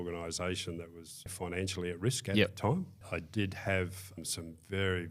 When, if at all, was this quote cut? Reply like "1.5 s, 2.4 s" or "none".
1.3 s, 3.0 s, 4.2 s